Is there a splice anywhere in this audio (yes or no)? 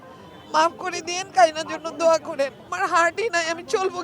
yes